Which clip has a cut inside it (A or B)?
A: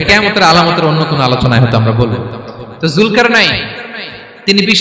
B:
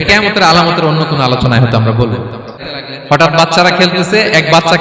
B